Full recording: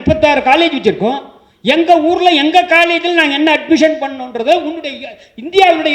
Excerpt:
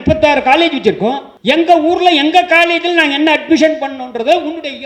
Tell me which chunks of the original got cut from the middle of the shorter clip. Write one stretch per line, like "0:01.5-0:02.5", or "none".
0:01.3-0:01.5